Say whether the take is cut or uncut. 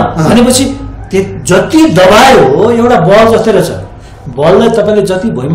uncut